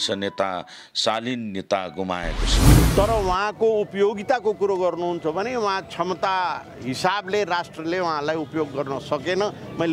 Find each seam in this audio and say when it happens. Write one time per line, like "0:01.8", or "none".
0:02.7